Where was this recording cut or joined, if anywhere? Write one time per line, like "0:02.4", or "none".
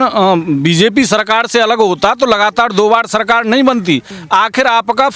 0:04.1